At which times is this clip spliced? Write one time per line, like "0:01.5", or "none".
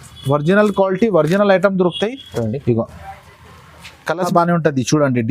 0:04.3